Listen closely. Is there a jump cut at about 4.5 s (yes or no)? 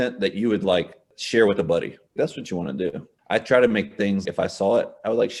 no